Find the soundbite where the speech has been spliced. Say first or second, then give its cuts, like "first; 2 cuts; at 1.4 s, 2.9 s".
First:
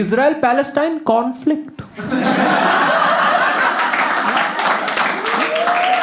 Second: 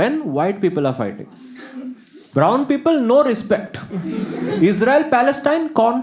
second; 1 cut; at 2.2 s